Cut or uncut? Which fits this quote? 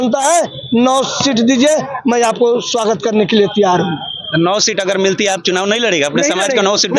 uncut